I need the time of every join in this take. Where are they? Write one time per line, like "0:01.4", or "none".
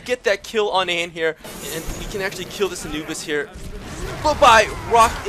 0:01.5